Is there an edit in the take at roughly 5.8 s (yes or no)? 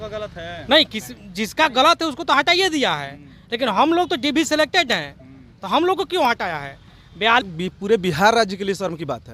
no